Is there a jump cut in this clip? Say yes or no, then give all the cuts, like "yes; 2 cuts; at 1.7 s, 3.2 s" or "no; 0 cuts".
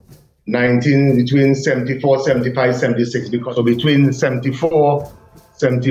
yes; 1 cut; at 3.4 s